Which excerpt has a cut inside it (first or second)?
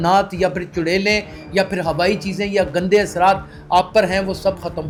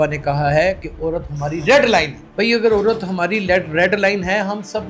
second